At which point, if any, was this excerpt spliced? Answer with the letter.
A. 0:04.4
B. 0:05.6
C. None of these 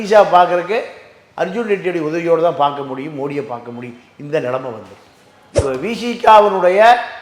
B